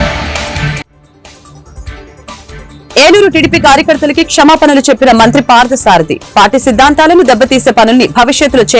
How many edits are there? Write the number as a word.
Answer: one